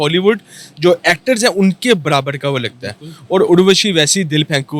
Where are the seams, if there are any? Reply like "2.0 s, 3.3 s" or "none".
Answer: none

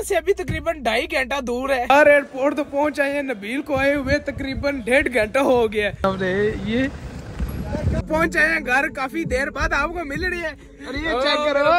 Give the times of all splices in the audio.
1.9 s, 6.0 s, 8.0 s

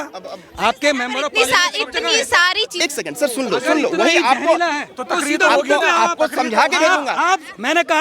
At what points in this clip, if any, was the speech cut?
2.8 s

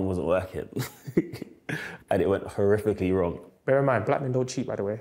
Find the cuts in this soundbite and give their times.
3.4 s

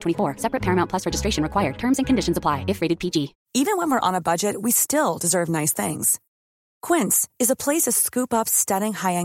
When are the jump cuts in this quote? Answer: 3.4 s

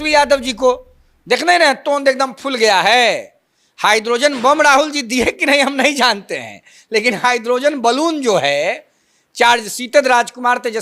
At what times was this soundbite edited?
none

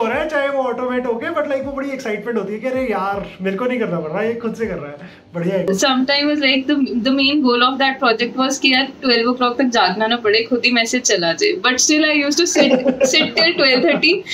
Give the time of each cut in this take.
5.7 s

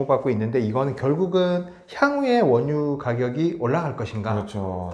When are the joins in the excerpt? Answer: none

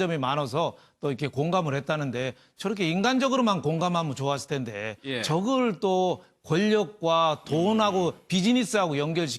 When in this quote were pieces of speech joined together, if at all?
none

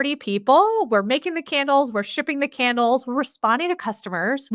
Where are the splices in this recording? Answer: none

